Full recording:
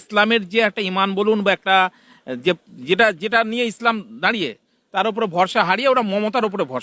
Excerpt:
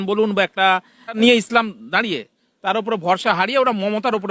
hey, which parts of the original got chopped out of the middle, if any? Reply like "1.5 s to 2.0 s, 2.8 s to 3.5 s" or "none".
2.3 s to 3.5 s